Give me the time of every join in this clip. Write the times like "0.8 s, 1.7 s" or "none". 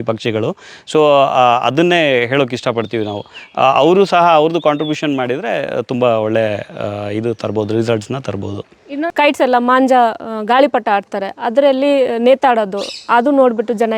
9.1 s

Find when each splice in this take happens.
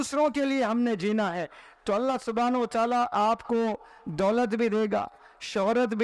none

